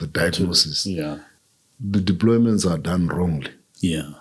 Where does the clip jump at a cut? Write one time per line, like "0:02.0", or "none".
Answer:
0:01.3